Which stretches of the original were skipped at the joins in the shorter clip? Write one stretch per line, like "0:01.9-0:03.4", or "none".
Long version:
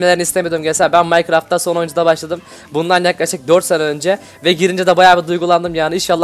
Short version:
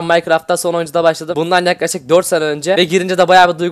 0:02.3-0:02.6
0:04.1-0:04.4